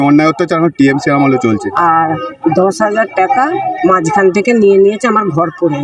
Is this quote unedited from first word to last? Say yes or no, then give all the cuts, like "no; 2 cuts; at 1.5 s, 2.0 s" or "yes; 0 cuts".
no; 1 cut; at 1.6 s